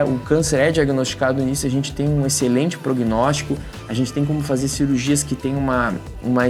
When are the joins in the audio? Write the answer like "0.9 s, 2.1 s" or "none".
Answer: none

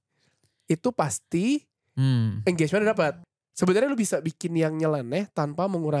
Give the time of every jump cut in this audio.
3.2 s

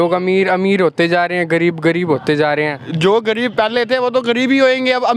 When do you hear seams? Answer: none

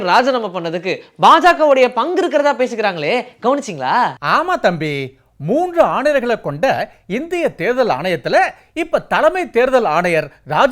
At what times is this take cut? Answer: none

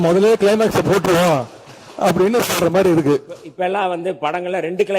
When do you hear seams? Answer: 3.4 s

